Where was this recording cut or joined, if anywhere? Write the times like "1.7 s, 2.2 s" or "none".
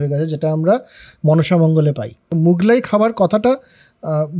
2.1 s